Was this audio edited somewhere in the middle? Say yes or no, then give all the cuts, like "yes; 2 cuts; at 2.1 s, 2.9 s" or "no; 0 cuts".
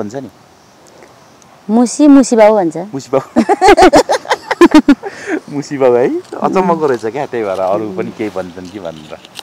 no; 0 cuts